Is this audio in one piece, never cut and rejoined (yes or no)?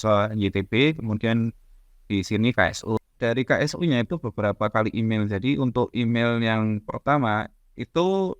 no